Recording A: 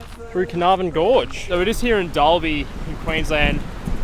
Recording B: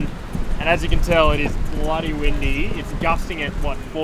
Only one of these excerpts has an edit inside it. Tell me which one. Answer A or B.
A